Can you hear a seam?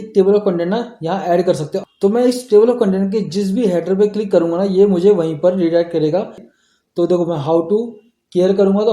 yes; 1 cut; at 6.5 s

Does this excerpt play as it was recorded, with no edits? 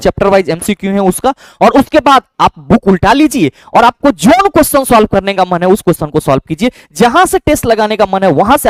yes; 0 cuts

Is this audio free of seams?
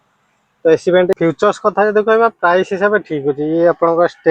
no; 1 cut; at 1.1 s

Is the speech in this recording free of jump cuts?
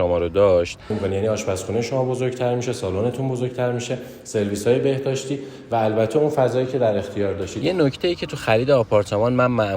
no; 2 cuts; at 0.9 s, 7.5 s

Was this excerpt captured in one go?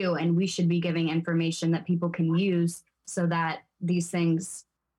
yes; 0 cuts

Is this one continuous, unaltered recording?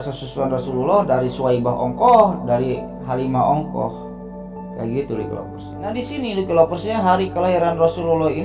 no; 1 cut; at 5.5 s

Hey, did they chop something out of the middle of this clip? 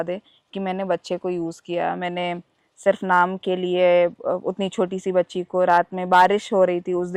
no; 0 cuts

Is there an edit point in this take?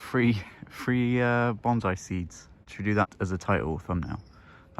yes; 1 cut; at 3.0 s

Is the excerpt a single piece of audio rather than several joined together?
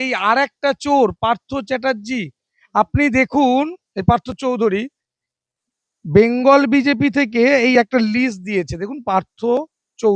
yes; 0 cuts

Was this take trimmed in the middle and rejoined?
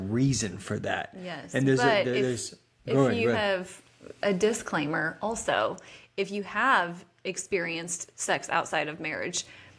no; 0 cuts

